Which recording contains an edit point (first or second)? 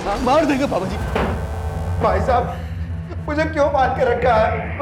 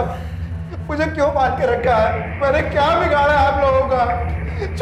first